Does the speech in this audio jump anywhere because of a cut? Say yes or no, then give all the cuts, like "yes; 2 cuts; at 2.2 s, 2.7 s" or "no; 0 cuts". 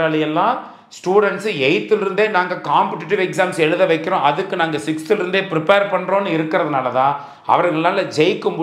no; 0 cuts